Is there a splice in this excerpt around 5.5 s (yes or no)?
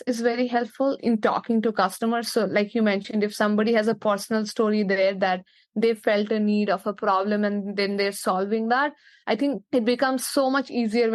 no